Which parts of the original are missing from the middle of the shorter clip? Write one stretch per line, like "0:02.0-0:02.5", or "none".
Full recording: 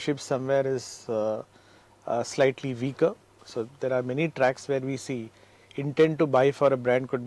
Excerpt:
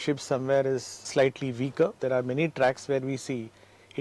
0:01.1-0:02.3
0:03.2-0:03.8